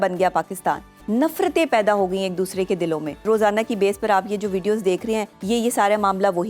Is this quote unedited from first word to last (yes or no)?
no